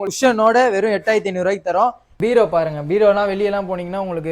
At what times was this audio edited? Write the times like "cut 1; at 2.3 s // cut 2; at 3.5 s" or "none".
cut 1; at 2.0 s